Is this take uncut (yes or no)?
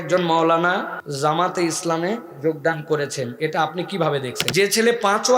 no